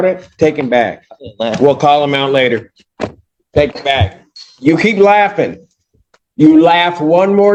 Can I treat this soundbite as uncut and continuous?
yes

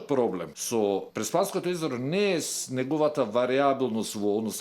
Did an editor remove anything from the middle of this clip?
yes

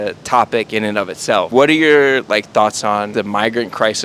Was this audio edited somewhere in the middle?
yes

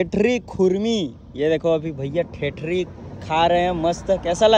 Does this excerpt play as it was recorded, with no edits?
yes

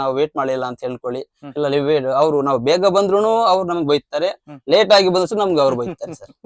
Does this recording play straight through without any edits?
yes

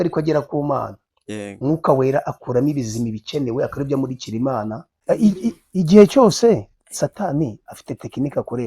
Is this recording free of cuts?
no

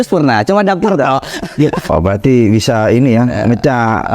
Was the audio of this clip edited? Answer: yes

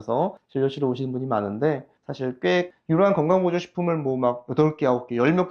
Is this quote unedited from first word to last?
no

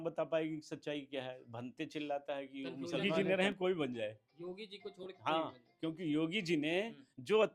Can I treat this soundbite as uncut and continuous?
no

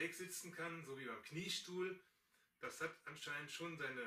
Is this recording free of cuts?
yes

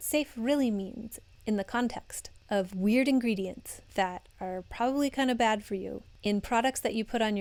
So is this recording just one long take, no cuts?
yes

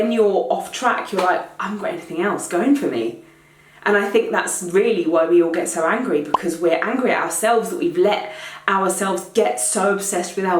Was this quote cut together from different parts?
no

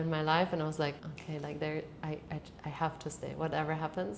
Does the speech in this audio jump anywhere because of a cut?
yes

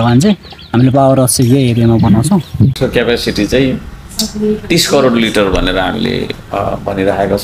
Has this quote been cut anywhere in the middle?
yes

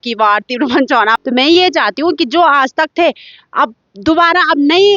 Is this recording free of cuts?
no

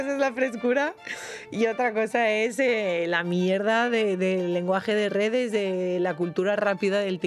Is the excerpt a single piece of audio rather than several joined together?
yes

